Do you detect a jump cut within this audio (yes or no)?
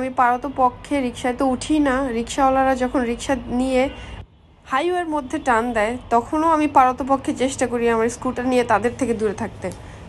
no